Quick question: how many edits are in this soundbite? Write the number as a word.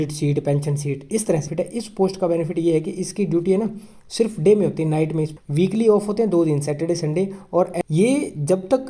three